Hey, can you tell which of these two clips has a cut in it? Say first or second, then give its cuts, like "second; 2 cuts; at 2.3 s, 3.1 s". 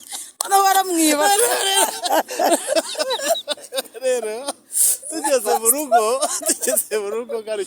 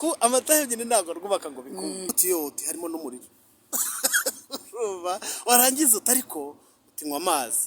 second; 1 cut; at 2.1 s